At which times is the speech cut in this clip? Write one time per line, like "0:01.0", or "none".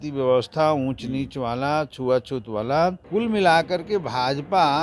0:03.0